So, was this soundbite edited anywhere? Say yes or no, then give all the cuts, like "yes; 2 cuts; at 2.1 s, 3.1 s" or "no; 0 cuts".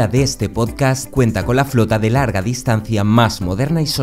no; 0 cuts